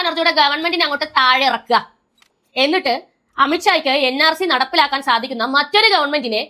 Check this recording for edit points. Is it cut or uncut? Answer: uncut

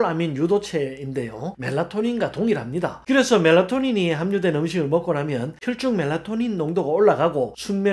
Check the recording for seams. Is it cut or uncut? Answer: uncut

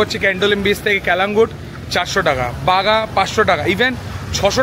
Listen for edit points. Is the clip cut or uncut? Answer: uncut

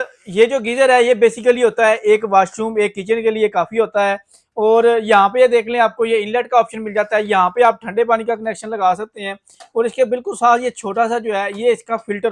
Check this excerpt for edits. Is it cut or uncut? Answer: uncut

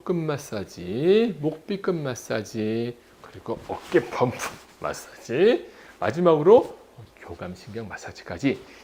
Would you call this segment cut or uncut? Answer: uncut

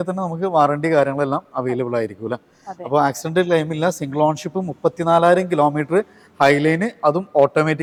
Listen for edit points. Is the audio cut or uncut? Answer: uncut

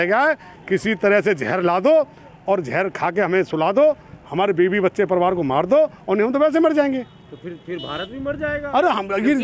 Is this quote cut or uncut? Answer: uncut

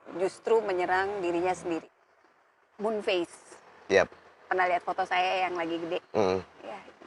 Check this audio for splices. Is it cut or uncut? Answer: cut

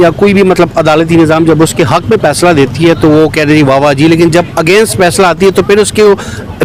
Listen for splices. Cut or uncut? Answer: uncut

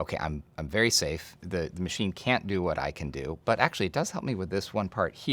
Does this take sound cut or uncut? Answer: uncut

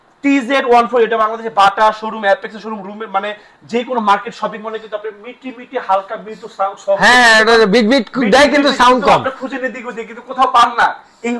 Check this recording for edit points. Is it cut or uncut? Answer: uncut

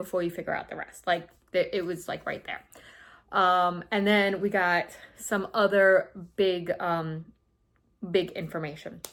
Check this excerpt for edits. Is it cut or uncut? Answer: uncut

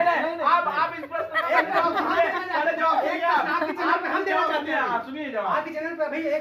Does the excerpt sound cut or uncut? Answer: uncut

